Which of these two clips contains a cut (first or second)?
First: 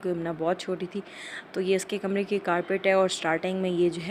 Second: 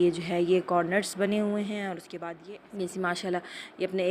second